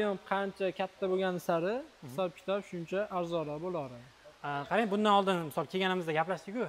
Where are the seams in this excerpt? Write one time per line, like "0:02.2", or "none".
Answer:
none